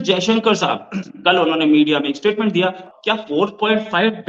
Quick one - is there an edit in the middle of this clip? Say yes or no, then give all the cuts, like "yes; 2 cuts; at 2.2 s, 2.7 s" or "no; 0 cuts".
yes; 1 cut; at 2.8 s